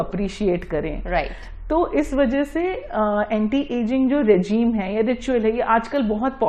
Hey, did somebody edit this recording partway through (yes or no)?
no